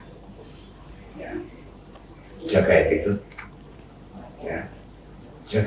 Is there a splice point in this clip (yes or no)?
no